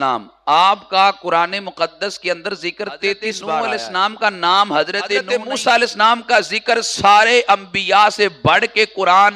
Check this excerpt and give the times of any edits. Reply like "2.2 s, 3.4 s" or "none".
3.6 s, 5.2 s